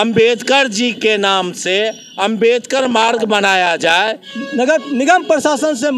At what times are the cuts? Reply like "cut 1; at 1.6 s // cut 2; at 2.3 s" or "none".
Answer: cut 1; at 4.3 s